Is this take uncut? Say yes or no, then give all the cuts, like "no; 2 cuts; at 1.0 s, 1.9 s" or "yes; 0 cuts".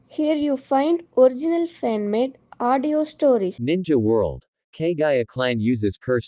no; 1 cut; at 3.6 s